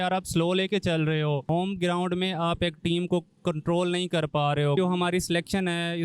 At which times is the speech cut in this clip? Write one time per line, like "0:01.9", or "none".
0:01.5
0:04.8